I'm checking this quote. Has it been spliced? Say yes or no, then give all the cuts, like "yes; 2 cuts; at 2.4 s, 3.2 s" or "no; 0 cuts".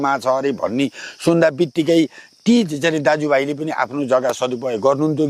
no; 0 cuts